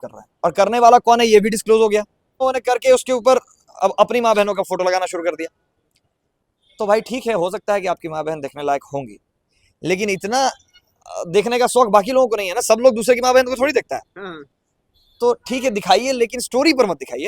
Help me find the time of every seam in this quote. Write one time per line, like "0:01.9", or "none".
0:02.4